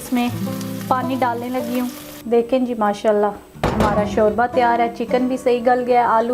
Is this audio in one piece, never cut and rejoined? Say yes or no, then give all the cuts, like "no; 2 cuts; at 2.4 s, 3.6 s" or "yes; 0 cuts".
no; 1 cut; at 2.1 s